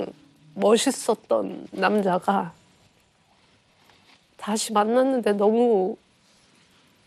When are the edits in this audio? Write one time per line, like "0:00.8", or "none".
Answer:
none